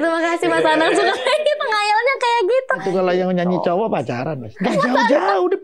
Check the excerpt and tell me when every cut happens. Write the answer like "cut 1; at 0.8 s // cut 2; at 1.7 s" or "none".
cut 1; at 2.8 s // cut 2; at 4.4 s

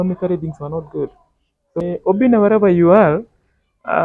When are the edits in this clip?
cut 1; at 1.8 s

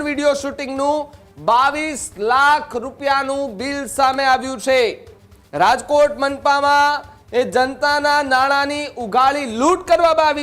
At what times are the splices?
none

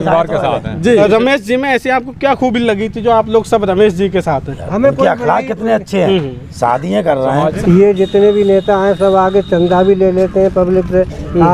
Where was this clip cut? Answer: cut 1; at 1.0 s // cut 2; at 7.6 s

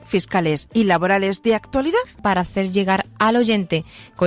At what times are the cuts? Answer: cut 1; at 2.2 s

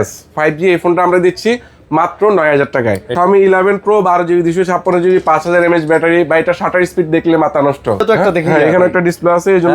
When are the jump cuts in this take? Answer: cut 1; at 3.1 s // cut 2; at 8.0 s

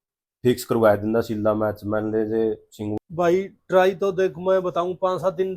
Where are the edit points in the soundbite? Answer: cut 1; at 2.9 s

